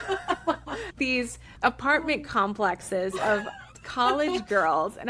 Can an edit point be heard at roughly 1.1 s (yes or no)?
yes